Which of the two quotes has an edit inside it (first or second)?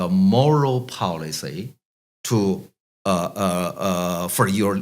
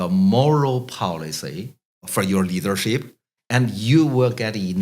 second